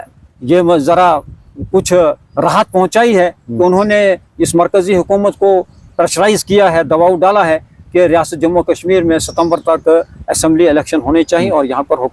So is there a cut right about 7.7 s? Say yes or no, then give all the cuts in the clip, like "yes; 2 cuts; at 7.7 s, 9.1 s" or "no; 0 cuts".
no; 0 cuts